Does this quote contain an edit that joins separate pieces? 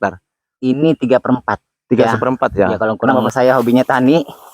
yes; 1 cut; at 3.0 s

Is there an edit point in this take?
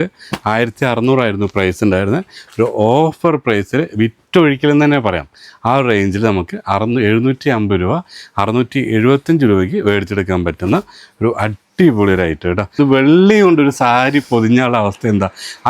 yes; 1 cut; at 12.7 s

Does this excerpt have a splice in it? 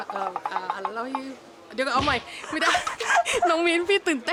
no; 0 cuts

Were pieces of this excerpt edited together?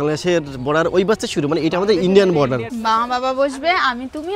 yes; 1 cut; at 2.7 s

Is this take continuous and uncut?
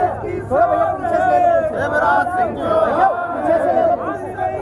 yes; 0 cuts

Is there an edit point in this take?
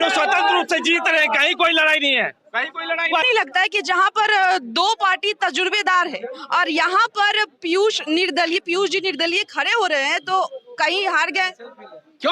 yes; 1 cut; at 3.2 s

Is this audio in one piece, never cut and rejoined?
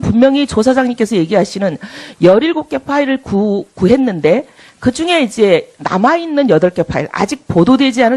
no; 1 cut; at 6.7 s

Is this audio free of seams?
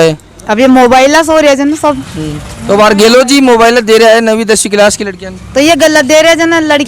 yes; 0 cuts

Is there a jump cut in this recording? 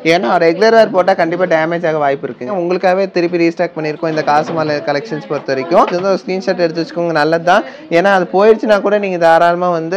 yes; 2 cuts; at 2.5 s, 5.9 s

